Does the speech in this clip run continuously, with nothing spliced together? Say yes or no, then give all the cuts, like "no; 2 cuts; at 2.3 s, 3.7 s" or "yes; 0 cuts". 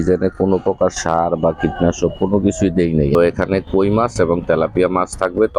no; 1 cut; at 3.1 s